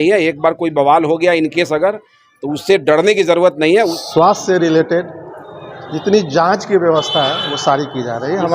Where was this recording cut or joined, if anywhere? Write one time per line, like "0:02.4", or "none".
0:04.0